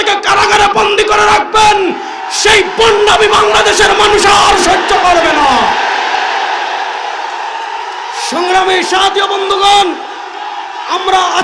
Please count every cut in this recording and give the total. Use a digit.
0